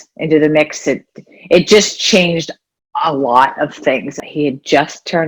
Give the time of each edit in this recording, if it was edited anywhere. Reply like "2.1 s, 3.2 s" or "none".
4.2 s